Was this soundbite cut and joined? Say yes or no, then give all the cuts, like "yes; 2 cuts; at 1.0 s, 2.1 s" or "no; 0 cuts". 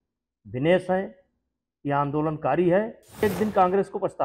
yes; 1 cut; at 3.2 s